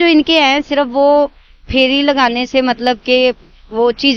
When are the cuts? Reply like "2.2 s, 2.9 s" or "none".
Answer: none